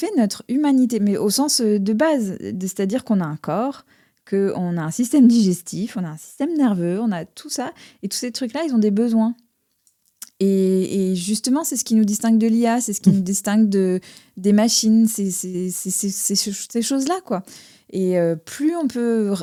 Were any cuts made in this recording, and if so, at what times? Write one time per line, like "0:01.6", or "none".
none